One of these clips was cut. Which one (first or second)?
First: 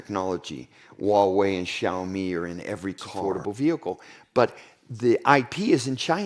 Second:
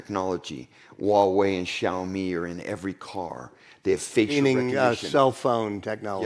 first